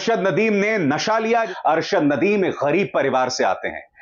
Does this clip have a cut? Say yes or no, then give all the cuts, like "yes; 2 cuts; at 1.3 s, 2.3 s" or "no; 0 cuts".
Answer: yes; 1 cut; at 1.5 s